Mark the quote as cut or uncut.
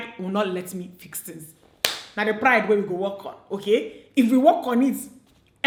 uncut